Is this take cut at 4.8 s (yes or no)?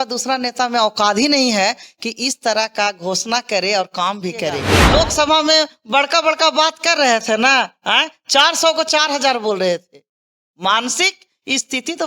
yes